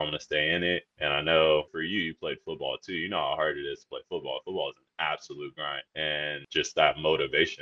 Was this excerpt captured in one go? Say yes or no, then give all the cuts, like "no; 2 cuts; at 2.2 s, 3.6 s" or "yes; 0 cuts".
no; 1 cut; at 0.9 s